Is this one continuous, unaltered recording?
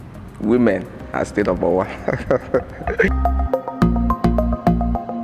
no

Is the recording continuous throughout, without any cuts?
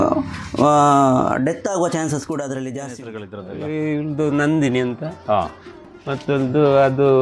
no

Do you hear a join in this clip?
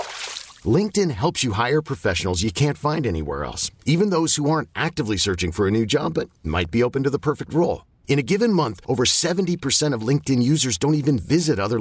no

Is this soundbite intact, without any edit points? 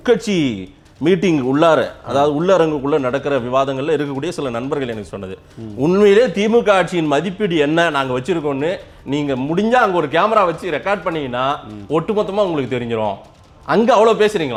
yes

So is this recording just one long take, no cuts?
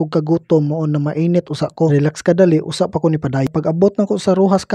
no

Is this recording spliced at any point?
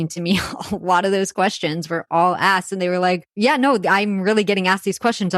yes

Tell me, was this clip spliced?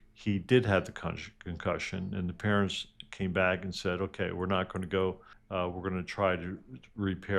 yes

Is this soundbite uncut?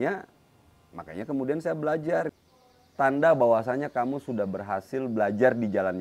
no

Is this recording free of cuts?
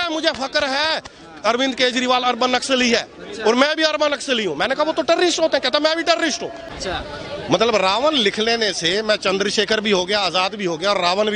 no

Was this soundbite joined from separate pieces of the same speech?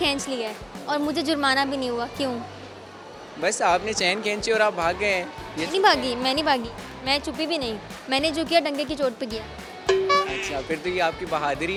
no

